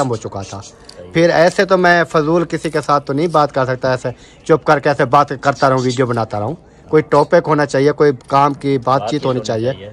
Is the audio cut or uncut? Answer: uncut